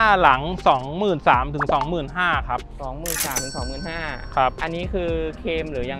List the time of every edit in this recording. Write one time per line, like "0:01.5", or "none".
none